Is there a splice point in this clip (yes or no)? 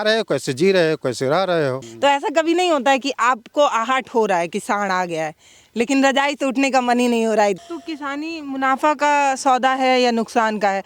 yes